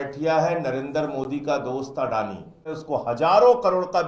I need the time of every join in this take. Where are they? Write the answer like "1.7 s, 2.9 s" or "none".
2.8 s